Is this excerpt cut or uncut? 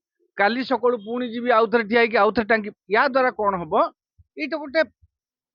uncut